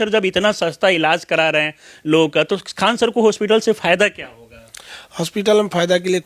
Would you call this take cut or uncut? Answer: uncut